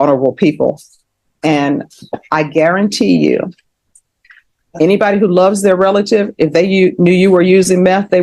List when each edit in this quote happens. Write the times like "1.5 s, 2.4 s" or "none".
none